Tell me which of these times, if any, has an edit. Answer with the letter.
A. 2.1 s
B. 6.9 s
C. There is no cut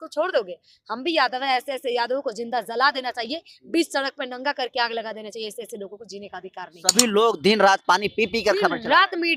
B